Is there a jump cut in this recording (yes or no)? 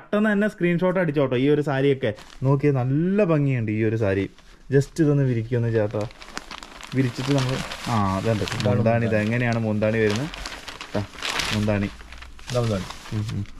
yes